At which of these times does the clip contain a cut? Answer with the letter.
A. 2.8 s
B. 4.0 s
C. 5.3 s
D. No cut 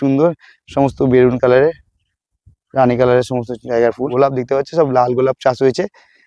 B